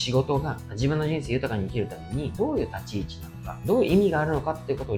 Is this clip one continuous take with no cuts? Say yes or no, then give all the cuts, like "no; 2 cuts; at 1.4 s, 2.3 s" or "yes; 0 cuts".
yes; 0 cuts